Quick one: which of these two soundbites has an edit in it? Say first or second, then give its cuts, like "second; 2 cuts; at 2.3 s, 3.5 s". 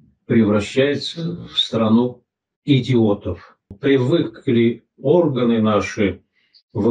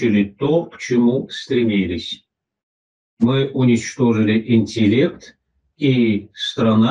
first; 1 cut; at 3.8 s